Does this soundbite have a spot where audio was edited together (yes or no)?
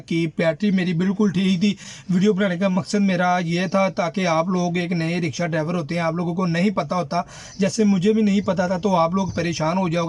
no